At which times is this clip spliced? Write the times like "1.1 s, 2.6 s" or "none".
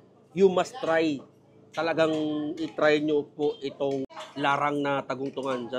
4.2 s